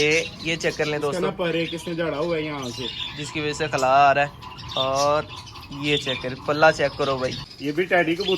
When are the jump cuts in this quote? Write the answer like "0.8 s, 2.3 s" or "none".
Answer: 7.5 s

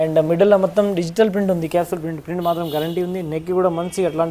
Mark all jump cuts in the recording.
none

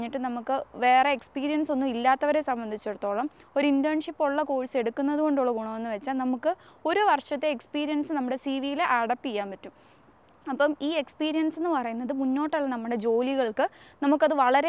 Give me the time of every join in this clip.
none

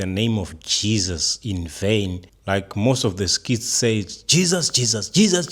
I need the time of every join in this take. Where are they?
2.3 s

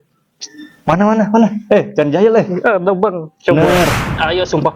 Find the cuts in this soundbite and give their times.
3.5 s

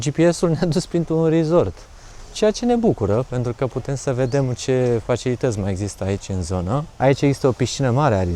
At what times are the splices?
none

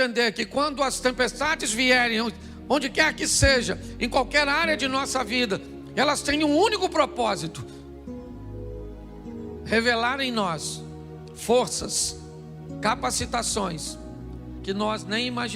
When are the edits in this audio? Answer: 7.5 s, 9.0 s

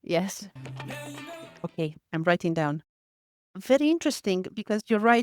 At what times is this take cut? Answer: 0.9 s

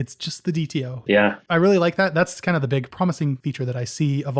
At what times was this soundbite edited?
1.0 s, 3.4 s

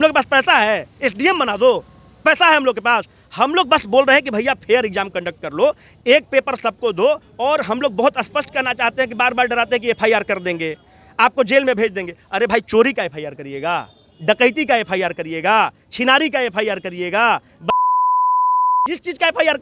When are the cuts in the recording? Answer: 7.3 s

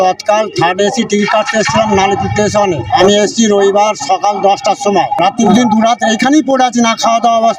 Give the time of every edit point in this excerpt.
3.0 s, 5.5 s

